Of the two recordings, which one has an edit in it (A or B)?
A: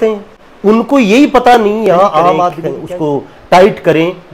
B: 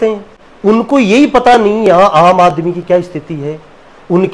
A